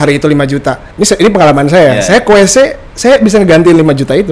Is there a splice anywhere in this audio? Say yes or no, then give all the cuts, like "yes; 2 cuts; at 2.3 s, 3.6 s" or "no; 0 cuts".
no; 0 cuts